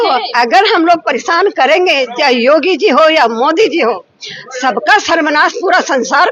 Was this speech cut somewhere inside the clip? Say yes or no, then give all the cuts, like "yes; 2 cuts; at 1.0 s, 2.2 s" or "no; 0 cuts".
no; 0 cuts